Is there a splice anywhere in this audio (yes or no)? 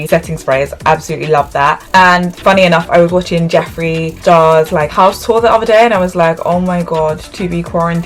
no